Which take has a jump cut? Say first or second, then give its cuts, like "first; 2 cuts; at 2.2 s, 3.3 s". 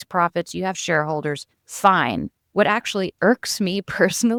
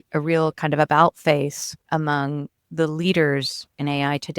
second; 1 cut; at 1.7 s